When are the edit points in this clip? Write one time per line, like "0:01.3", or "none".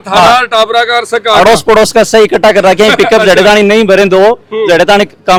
none